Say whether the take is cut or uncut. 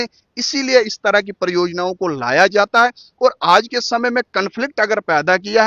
uncut